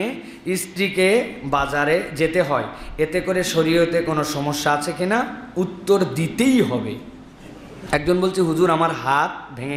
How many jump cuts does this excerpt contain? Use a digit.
1